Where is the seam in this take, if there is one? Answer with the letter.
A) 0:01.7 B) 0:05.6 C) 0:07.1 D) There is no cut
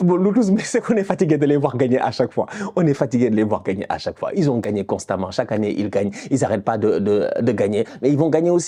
D